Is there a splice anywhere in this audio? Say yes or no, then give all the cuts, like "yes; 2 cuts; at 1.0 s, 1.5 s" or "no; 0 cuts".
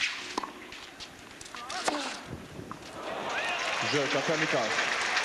no; 0 cuts